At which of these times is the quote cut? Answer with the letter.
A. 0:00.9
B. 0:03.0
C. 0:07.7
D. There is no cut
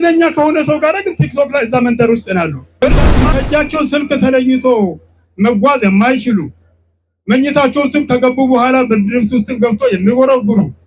B